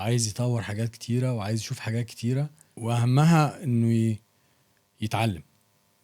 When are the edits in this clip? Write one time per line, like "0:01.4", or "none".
0:02.6